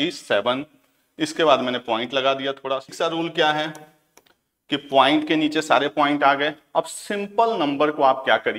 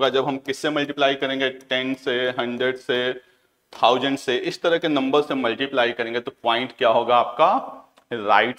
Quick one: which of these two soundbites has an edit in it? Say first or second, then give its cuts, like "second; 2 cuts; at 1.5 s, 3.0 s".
first; 1 cut; at 2.9 s